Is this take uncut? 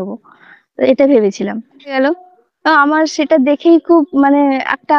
no; 1 cut; at 2.0 s

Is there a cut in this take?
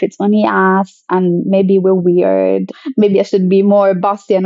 no; 0 cuts

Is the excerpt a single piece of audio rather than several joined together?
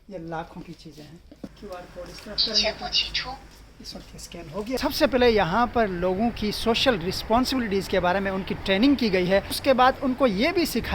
no; 3 cuts; at 1.5 s, 5.2 s, 9.5 s

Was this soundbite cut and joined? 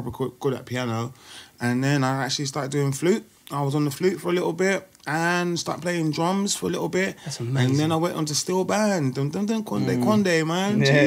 no; 0 cuts

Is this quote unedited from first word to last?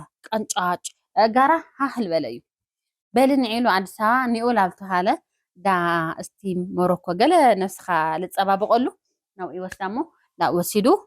yes; 0 cuts

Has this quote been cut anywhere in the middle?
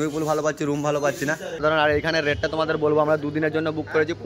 no; 0 cuts

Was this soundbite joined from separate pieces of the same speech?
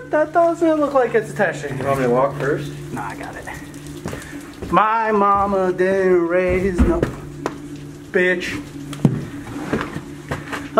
no; 0 cuts

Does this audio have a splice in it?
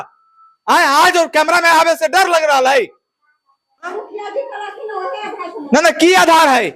yes; 1 cut; at 3.9 s

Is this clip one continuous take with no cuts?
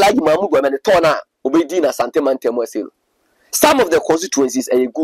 yes; 0 cuts

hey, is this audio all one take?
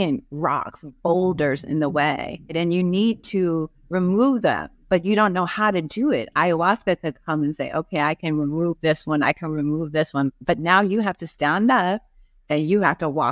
no; 1 cut; at 2.5 s

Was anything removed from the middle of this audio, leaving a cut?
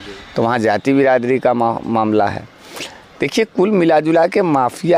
no; 0 cuts

